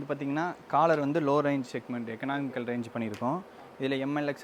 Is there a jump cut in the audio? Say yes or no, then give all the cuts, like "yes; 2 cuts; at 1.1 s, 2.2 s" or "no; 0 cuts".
no; 0 cuts